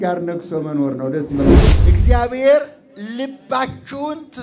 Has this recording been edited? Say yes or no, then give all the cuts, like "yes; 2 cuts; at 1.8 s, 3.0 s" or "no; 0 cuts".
yes; 1 cut; at 1.8 s